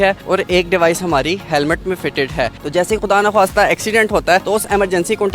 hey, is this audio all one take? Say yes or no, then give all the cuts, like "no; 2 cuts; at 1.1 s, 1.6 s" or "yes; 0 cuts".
no; 2 cuts; at 2.5 s, 4.4 s